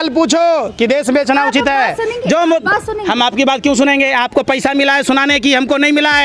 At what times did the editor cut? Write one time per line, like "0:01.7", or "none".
none